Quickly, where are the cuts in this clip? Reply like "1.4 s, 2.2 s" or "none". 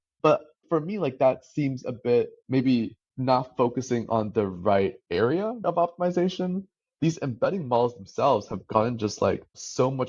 none